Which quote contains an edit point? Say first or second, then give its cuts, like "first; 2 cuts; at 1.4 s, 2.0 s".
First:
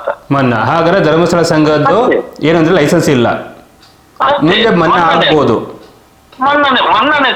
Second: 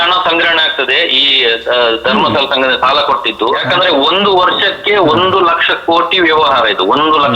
second; 1 cut; at 3.6 s